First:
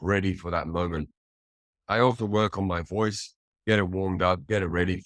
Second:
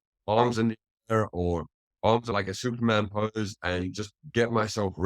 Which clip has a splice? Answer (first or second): second